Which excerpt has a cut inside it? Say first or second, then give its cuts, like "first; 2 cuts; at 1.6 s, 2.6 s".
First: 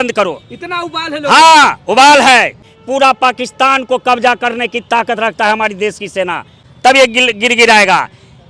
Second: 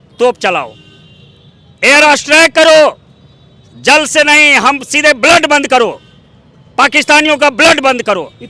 first; 2 cuts; at 2.6 s, 6.6 s